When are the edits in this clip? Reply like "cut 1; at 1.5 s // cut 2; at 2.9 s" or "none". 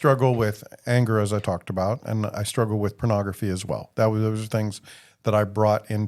none